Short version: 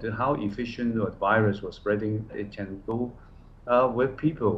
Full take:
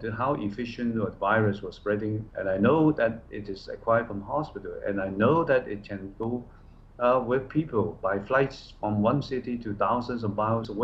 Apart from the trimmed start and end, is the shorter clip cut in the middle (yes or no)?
yes